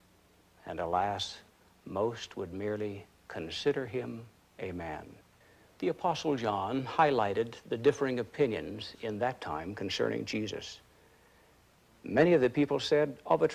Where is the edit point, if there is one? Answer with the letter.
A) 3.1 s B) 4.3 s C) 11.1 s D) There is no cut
D